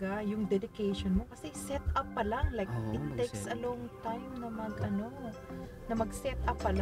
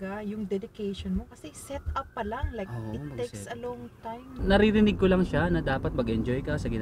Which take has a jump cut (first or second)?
second